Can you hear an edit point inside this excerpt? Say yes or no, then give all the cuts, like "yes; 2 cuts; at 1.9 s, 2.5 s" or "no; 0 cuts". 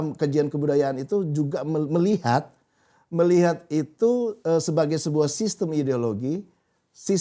no; 0 cuts